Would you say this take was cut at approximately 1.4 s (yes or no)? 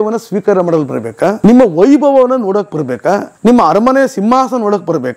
yes